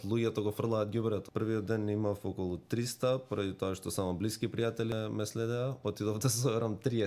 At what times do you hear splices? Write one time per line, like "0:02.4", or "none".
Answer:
0:01.3
0:04.9